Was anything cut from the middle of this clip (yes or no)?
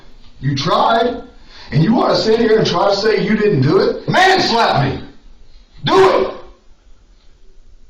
yes